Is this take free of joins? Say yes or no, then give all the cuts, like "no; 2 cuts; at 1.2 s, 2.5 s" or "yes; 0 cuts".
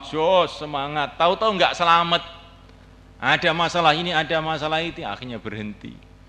yes; 0 cuts